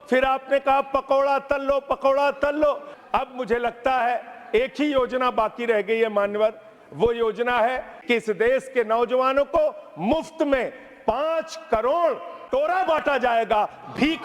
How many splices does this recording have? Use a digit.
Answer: 2